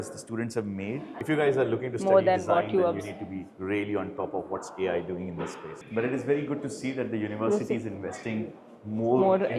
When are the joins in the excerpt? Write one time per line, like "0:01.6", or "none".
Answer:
0:01.2
0:05.8